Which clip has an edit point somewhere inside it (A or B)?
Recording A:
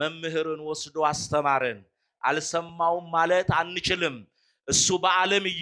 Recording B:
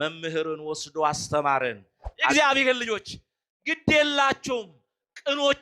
B